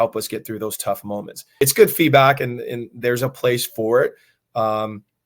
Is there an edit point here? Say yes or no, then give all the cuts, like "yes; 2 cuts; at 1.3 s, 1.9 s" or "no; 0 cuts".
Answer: yes; 1 cut; at 1.6 s